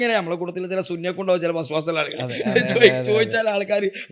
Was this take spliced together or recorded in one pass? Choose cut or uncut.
uncut